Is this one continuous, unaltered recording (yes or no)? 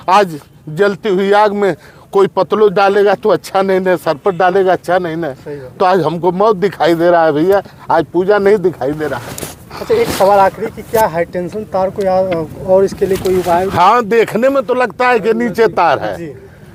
yes